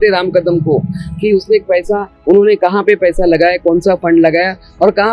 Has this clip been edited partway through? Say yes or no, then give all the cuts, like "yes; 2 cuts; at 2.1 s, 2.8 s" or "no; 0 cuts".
no; 0 cuts